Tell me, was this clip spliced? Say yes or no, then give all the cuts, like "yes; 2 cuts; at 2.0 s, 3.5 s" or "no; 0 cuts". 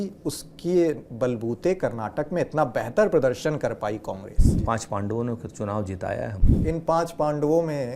yes; 2 cuts; at 4.6 s, 6.5 s